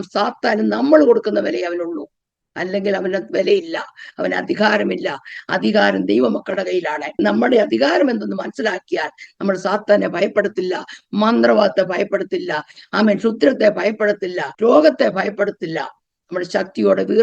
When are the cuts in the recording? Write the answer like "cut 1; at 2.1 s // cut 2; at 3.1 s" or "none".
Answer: cut 1; at 7.2 s // cut 2; at 14.5 s